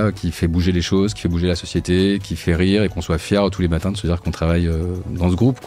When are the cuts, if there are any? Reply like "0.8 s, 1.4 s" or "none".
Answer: none